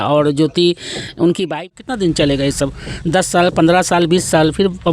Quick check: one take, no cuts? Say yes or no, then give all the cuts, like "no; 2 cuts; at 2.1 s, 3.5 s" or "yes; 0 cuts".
no; 1 cut; at 1.7 s